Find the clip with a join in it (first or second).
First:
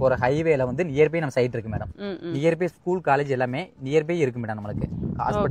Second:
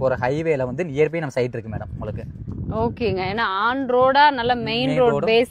first